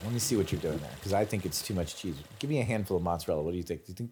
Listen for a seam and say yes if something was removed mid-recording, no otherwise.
no